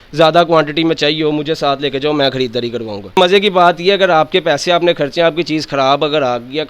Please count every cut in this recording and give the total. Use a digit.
1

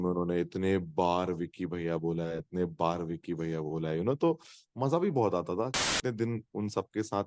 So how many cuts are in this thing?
1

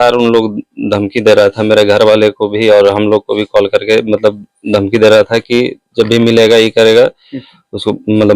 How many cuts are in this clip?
0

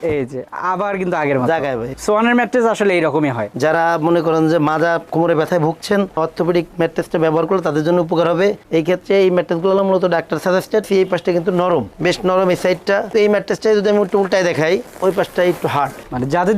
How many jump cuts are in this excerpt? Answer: 4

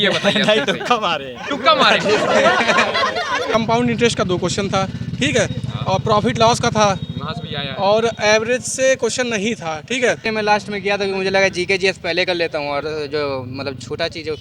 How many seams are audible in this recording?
2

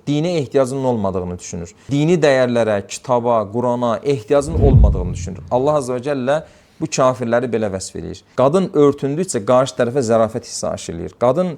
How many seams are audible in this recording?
1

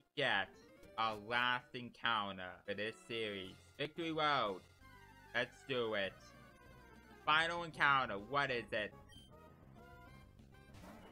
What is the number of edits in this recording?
3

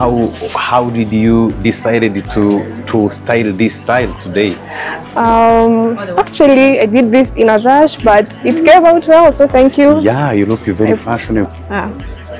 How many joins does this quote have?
1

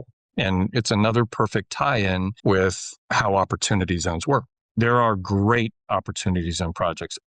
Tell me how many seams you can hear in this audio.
2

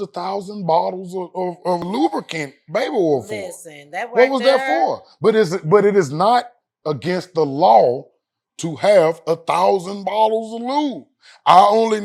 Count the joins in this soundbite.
0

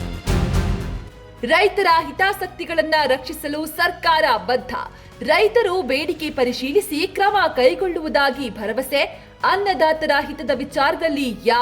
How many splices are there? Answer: 1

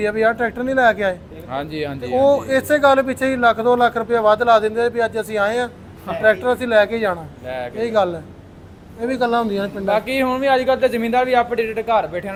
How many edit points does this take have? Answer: 0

